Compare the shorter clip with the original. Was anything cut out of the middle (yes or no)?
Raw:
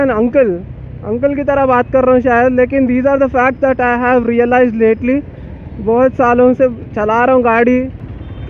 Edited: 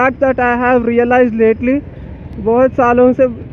no